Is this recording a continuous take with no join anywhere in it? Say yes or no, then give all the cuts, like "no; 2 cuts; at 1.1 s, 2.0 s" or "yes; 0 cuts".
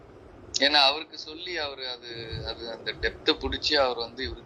yes; 0 cuts